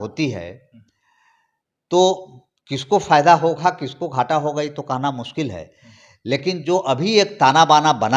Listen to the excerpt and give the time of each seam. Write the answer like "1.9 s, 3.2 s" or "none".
none